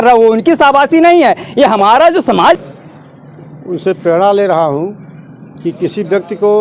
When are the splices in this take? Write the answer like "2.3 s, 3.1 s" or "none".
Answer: 2.6 s

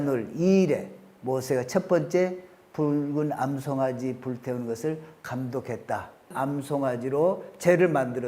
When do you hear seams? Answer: 6.3 s

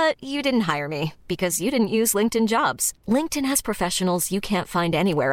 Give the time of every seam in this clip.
none

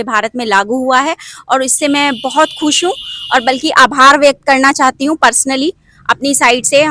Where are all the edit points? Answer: none

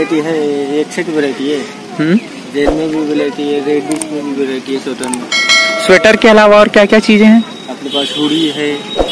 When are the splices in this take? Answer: none

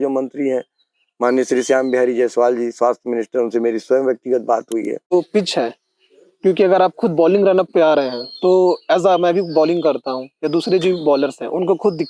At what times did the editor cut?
5.1 s

